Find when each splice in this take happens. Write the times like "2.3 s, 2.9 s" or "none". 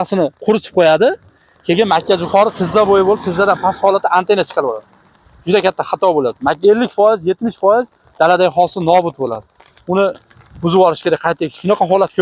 none